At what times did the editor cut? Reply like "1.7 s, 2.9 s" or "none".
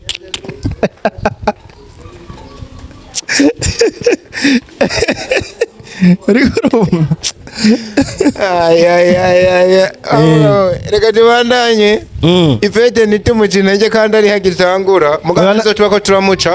none

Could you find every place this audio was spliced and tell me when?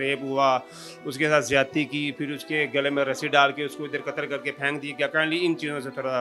none

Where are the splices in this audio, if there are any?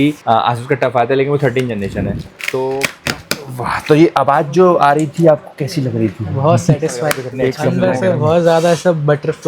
2.9 s, 7.5 s

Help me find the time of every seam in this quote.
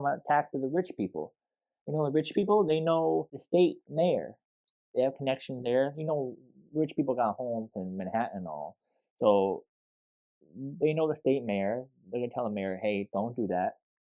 none

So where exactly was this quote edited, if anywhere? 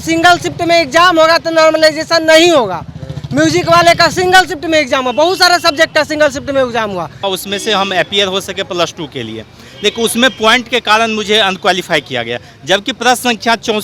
7.2 s

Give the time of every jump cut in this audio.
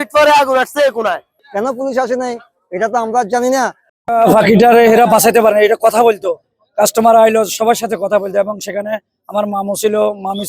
1.3 s, 3.8 s

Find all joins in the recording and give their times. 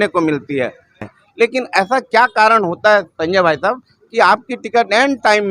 1.0 s

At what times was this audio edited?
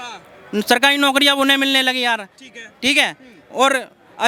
none

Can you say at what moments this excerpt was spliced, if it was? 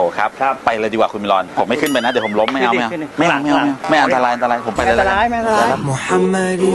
5.7 s

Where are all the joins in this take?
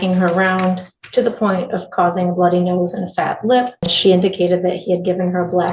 3.9 s

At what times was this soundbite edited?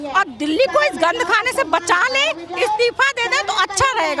none

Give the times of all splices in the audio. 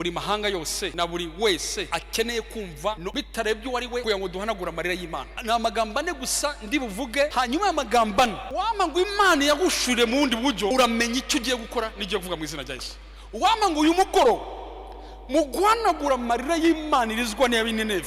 0.9 s, 1.9 s, 3.0 s, 4.0 s, 5.3 s, 7.3 s, 8.4 s, 10.7 s

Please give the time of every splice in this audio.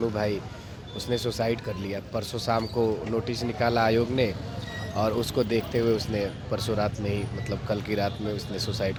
none

